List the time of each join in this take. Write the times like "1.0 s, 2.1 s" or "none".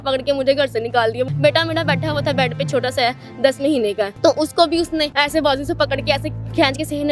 1.3 s, 4.1 s, 5.1 s

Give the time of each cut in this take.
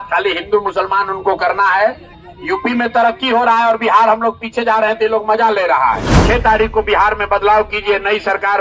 6.1 s

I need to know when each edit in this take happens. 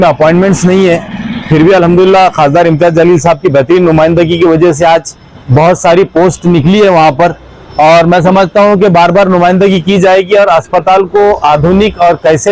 none

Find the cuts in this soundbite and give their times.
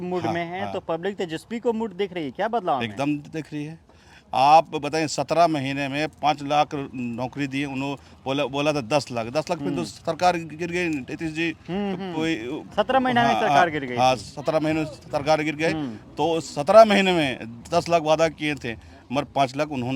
none

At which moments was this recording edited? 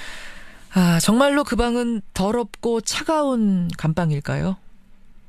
none

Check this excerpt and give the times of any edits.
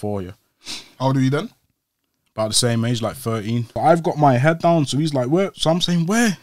3.7 s

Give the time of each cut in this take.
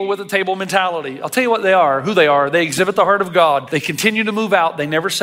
3.7 s

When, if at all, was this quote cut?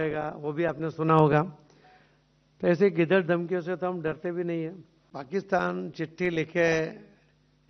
5.0 s

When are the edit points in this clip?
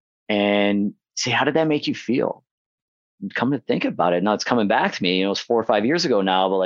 none

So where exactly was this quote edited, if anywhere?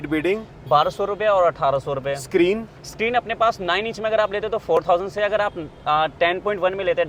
none

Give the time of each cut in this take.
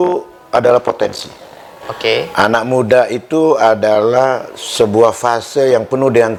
none

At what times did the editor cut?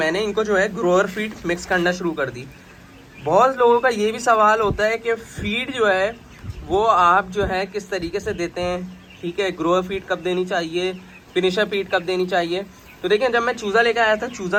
none

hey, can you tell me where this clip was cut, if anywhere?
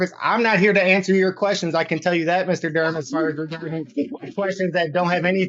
none

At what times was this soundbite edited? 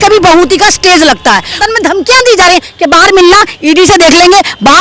1.6 s

